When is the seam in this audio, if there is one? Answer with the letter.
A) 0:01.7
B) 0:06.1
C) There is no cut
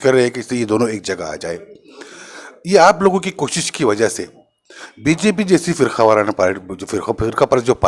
C